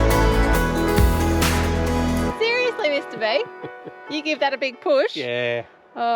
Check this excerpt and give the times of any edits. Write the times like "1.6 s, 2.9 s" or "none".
2.4 s